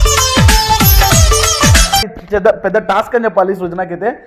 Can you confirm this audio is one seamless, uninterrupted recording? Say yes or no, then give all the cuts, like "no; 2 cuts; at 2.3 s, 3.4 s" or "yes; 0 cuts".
yes; 0 cuts